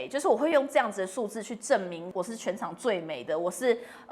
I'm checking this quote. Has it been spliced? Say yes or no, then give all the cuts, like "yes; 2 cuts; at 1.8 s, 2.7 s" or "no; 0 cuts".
yes; 1 cut; at 2.0 s